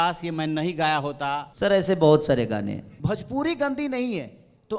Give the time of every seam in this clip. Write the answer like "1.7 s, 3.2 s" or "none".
1.5 s, 2.9 s